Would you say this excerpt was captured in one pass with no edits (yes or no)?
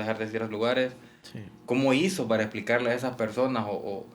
no